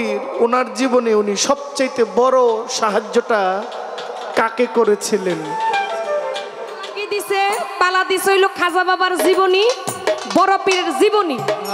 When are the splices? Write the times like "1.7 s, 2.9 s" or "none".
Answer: 7.0 s